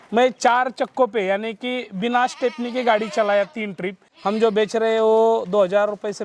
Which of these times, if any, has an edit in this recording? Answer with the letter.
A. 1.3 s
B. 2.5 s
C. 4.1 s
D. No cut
C